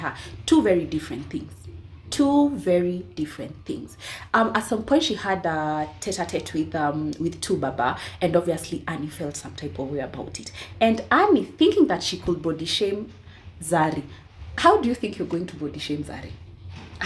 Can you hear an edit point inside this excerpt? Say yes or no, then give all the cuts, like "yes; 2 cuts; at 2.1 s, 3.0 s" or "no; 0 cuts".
no; 0 cuts